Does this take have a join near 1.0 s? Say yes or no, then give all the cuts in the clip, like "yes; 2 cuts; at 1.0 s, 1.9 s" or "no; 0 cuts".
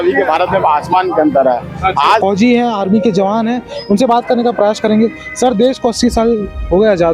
no; 1 cut; at 2.2 s